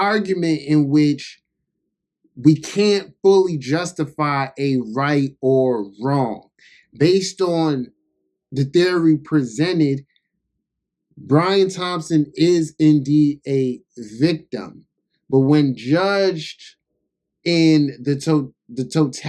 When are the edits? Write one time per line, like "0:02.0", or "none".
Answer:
none